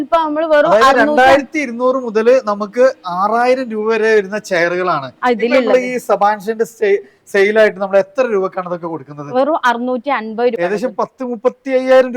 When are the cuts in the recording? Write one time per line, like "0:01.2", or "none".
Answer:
0:10.6